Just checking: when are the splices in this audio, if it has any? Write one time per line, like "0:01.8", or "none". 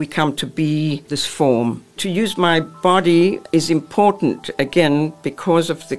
0:01.9